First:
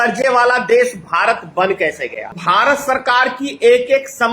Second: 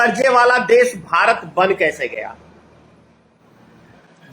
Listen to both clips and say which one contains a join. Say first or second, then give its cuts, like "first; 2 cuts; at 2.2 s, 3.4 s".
first; 1 cut; at 2.4 s